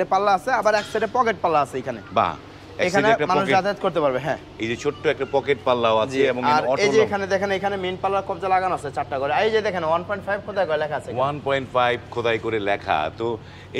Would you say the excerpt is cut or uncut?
uncut